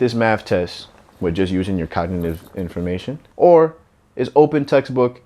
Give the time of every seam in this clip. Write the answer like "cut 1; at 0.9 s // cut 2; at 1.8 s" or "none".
cut 1; at 3.2 s